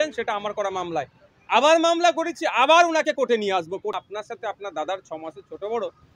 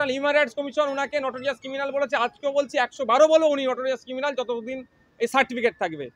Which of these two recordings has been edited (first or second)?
first